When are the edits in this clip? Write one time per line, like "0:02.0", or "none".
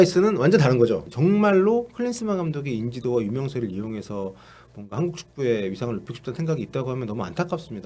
0:01.0